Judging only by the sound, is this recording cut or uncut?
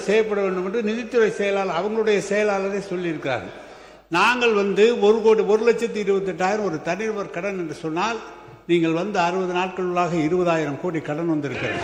uncut